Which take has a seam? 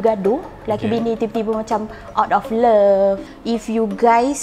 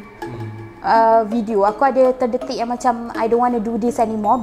first; 1 cut; at 3.3 s

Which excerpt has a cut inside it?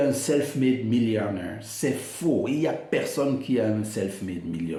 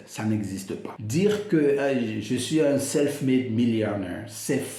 second; 1 cut; at 0.9 s

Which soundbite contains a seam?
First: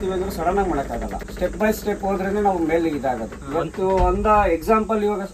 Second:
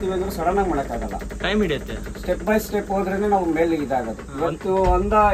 first; 1 cut; at 1.2 s

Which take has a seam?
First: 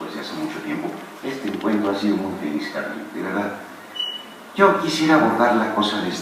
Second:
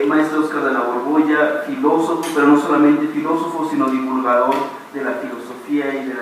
first; 1 cut; at 2.4 s

